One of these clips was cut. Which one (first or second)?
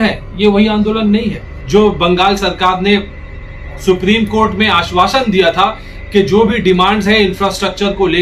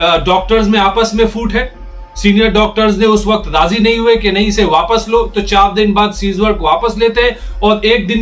first